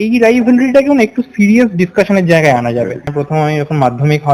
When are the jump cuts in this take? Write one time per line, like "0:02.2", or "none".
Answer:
0:03.1